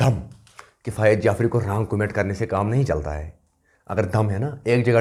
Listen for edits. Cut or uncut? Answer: uncut